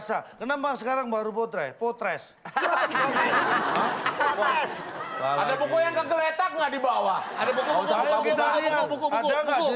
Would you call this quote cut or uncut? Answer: cut